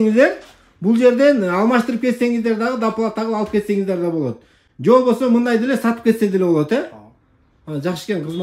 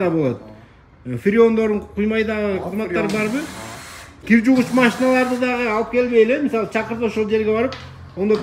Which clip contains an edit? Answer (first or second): second